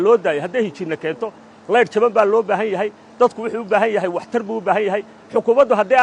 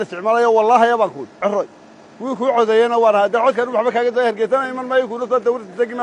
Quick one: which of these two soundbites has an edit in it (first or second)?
second